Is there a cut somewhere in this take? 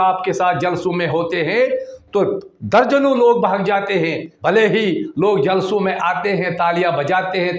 yes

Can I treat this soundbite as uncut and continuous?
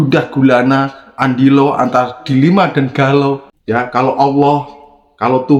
no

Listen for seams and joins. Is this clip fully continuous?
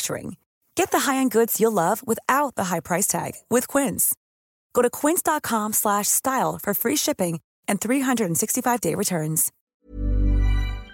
no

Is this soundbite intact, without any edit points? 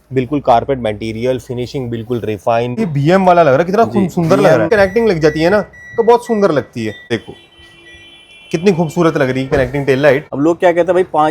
no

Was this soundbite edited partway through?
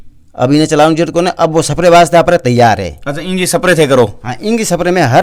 no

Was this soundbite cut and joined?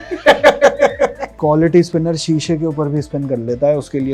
yes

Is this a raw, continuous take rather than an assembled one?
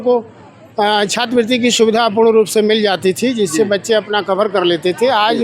yes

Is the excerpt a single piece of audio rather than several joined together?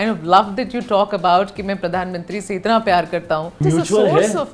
no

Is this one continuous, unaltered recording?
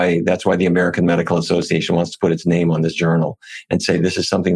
yes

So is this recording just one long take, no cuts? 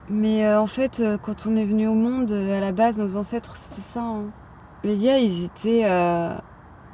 yes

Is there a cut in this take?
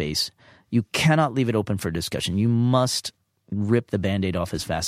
no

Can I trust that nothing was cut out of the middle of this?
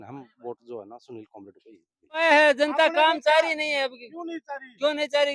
no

